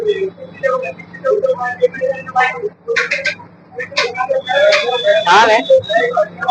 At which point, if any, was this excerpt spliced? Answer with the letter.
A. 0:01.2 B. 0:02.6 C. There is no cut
C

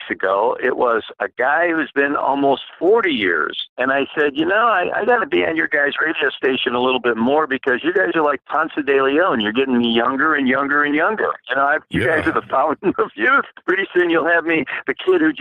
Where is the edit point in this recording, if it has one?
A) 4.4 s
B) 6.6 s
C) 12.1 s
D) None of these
B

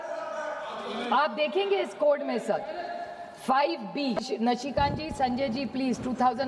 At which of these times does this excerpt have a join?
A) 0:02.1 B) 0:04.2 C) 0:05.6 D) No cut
B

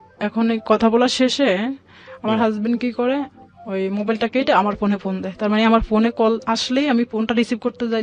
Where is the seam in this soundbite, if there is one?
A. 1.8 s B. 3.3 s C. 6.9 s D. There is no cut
D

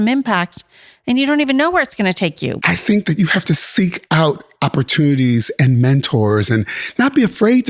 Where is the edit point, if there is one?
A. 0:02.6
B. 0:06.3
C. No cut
A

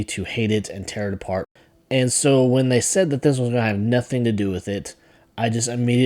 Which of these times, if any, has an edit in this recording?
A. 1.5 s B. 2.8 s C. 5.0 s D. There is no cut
A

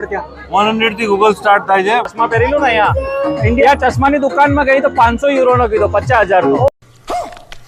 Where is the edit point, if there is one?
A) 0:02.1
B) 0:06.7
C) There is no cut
A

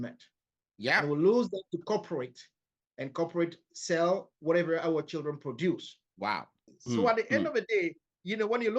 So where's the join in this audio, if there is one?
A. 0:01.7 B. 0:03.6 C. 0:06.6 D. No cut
C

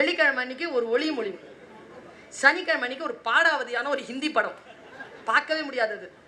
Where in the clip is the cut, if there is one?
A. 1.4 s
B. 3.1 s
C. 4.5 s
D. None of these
D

